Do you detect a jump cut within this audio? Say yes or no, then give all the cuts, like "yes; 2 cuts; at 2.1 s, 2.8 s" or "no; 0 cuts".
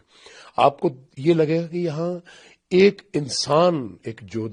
no; 0 cuts